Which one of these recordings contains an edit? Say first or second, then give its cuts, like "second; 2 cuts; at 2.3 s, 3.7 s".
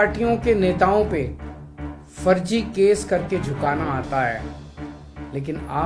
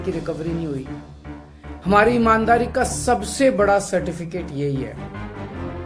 second; 1 cut; at 4.9 s